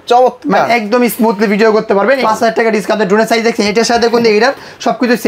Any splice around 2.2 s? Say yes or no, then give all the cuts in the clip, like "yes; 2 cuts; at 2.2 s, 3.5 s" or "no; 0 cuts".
yes; 1 cut; at 2.2 s